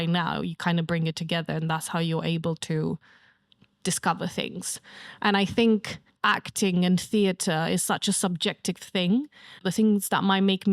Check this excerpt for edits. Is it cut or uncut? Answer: cut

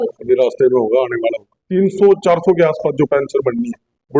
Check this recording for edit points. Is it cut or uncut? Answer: cut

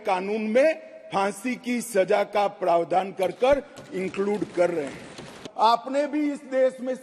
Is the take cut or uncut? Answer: cut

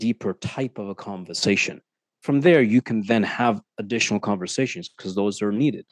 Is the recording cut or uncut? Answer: uncut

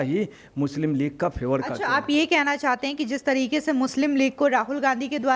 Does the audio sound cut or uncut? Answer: uncut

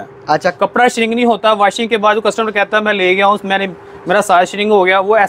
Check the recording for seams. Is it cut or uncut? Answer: uncut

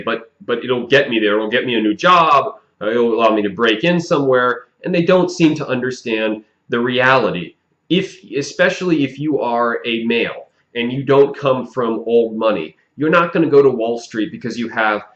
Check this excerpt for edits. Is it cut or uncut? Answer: uncut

